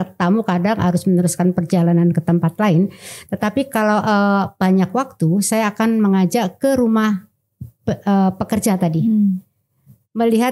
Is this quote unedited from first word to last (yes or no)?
yes